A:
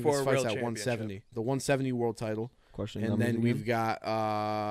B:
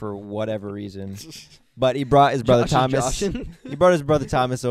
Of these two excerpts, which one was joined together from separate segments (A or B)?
A